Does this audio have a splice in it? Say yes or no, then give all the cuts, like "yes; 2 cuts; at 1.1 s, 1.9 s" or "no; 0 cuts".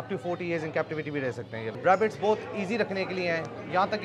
yes; 1 cut; at 1.7 s